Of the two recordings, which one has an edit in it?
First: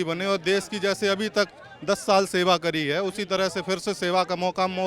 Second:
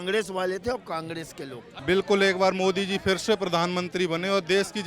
second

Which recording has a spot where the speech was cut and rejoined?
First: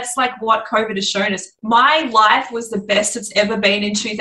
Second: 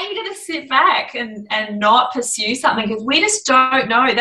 first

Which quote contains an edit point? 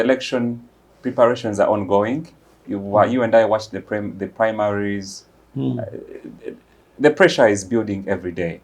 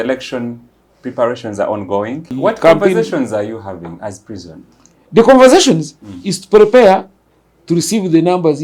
second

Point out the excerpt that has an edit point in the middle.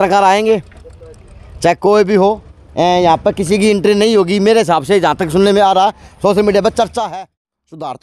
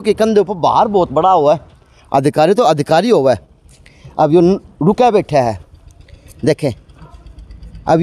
first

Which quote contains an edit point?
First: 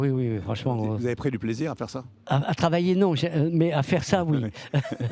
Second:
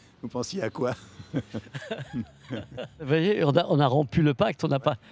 second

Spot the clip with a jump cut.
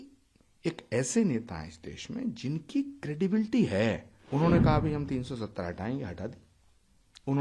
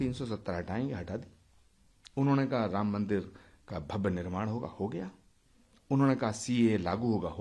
first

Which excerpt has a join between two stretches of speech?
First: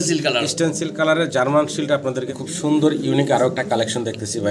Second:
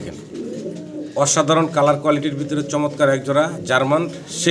first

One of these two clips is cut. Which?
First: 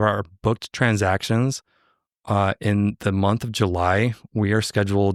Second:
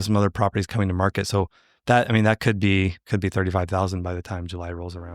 second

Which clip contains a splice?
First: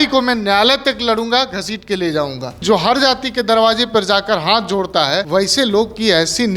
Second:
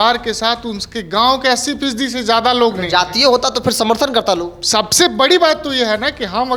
first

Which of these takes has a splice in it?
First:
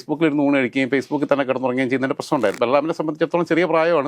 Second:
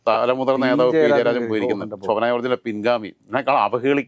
first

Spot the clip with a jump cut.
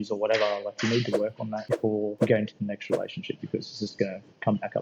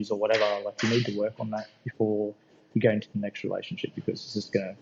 first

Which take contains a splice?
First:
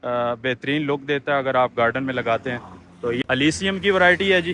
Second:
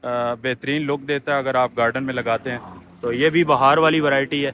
first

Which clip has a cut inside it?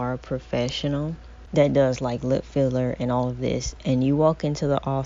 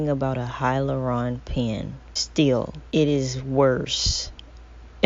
second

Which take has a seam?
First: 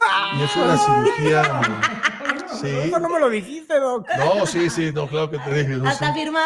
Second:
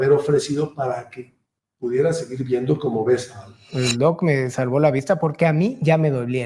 second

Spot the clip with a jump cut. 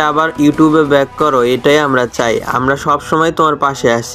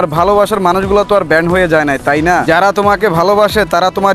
second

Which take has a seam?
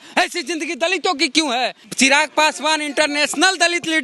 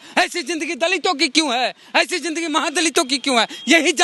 first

